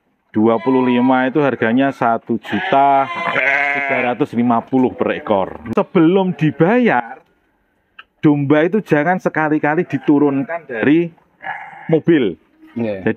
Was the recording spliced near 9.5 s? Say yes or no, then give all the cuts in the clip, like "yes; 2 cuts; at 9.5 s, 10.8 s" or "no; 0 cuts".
no; 1 cut; at 5.7 s